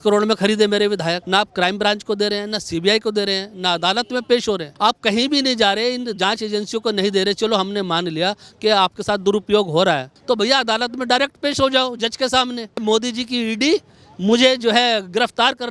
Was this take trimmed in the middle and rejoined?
yes; 4 cuts; at 1.2 s, 4.7 s, 10.1 s, 12.8 s

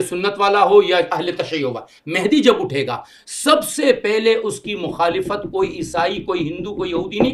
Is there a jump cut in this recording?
no; 0 cuts

